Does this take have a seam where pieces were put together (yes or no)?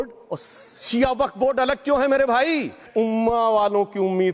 yes